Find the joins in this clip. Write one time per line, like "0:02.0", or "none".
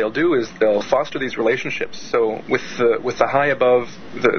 0:03.2